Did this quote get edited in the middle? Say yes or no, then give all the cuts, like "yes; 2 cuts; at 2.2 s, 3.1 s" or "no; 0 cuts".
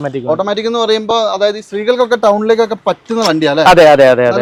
no; 0 cuts